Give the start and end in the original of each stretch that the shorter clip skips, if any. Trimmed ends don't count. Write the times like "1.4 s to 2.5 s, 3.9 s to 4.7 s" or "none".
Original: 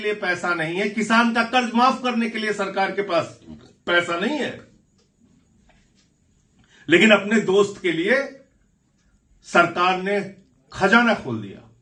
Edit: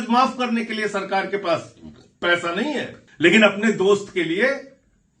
4.7 s to 6.7 s